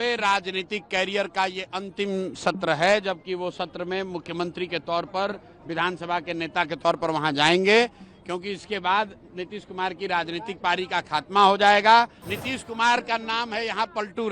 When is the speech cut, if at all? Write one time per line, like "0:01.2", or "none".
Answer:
0:12.3